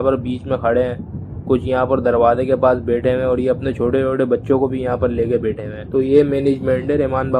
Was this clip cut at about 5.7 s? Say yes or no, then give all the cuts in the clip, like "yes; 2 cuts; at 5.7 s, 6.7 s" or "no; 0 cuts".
yes; 1 cut; at 5.7 s